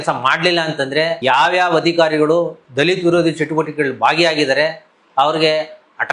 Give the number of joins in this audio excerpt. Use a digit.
1